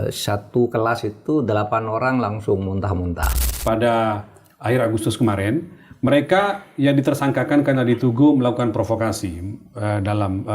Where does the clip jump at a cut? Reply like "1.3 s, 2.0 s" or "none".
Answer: 3.4 s